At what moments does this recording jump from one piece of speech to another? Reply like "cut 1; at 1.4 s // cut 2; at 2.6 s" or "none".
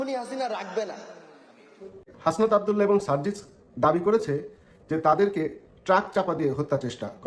cut 1; at 2.0 s